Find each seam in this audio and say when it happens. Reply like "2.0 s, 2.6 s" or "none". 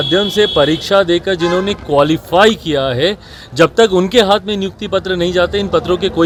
none